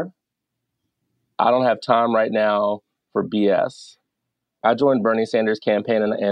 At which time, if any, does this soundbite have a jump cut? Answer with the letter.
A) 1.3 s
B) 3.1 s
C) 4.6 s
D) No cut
C